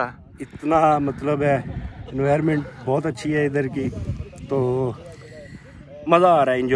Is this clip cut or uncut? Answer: uncut